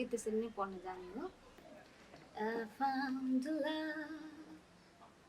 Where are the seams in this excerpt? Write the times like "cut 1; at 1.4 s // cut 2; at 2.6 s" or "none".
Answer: cut 1; at 1.7 s